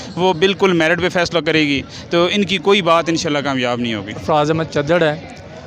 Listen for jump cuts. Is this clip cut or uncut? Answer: cut